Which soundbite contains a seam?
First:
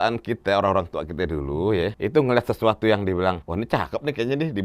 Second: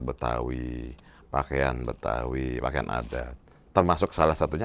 first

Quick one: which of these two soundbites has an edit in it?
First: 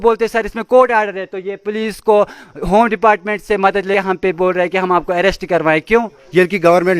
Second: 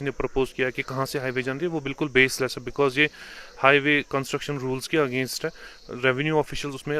first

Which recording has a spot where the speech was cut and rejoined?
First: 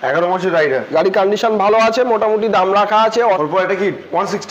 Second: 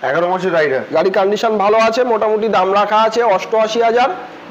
first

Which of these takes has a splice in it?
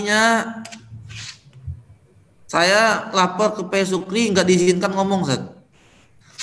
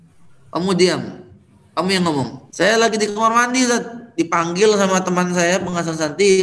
second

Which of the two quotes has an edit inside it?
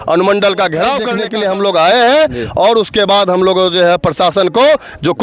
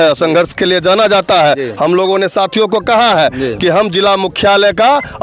first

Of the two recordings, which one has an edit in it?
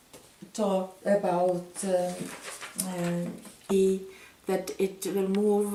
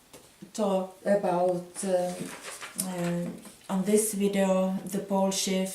second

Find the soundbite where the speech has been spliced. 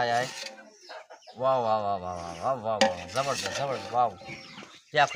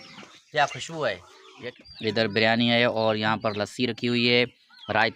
second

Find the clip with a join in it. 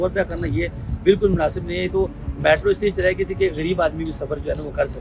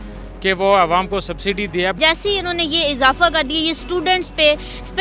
second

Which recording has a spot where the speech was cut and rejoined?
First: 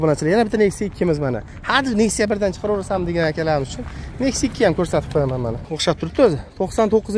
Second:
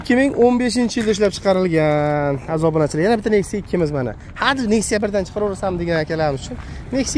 first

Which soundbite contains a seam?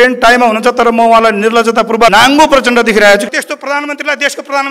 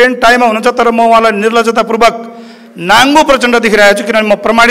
first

